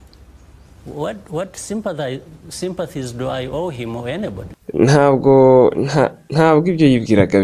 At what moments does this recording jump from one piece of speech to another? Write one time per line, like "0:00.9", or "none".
0:04.5